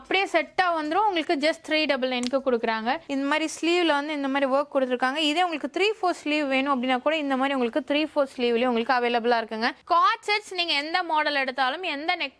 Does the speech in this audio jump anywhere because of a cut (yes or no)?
yes